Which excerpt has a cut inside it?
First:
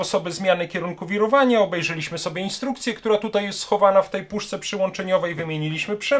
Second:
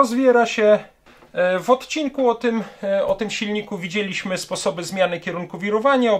second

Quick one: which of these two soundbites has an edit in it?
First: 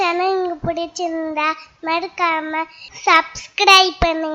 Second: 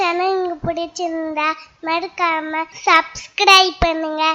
second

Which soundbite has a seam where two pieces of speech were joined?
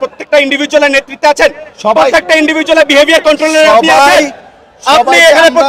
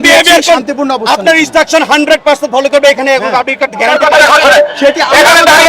second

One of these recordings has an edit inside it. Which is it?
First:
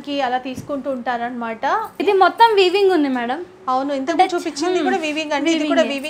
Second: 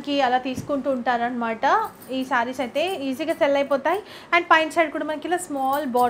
first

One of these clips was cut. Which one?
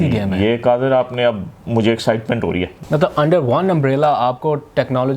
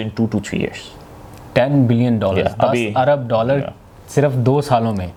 first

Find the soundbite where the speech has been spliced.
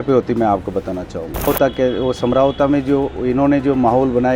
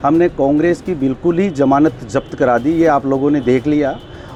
first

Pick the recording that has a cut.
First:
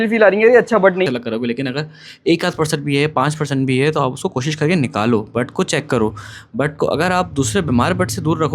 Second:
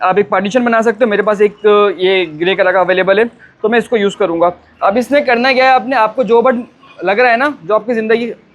first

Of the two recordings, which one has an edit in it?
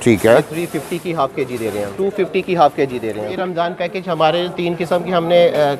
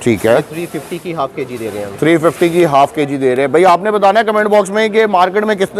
first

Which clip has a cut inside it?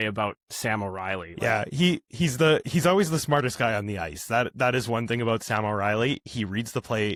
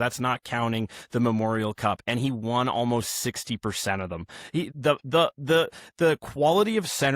second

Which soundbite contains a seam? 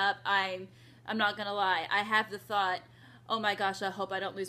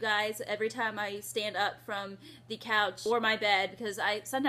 second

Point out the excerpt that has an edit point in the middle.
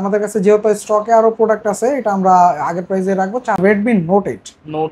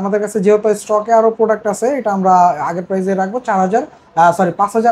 first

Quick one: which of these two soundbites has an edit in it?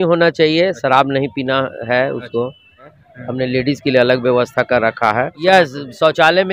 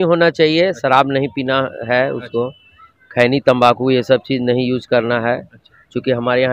first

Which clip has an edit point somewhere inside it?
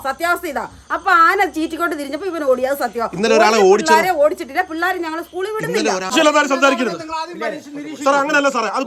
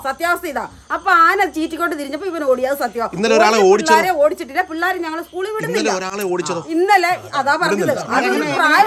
first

